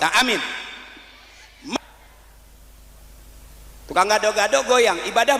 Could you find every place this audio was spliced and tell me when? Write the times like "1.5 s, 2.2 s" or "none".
1.7 s